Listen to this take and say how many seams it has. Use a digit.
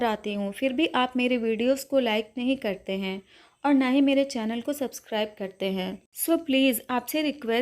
1